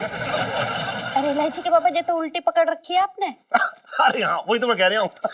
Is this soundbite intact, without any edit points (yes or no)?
yes